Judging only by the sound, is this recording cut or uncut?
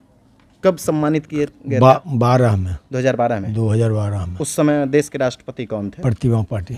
uncut